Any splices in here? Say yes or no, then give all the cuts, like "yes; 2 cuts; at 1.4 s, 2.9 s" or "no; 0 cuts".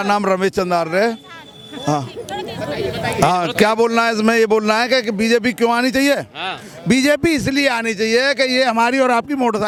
no; 0 cuts